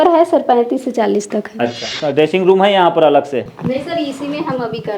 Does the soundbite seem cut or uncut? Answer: cut